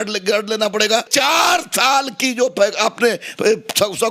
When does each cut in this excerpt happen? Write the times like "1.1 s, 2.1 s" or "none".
1.1 s